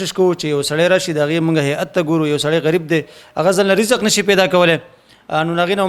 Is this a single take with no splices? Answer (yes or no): yes